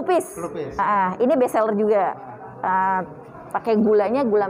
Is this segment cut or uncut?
uncut